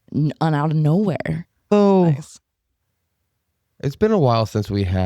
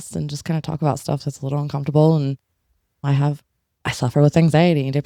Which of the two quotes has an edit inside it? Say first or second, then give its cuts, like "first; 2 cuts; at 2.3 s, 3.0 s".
first; 1 cut; at 1.7 s